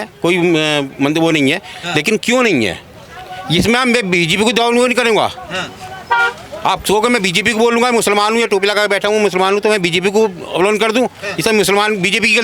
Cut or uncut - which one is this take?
uncut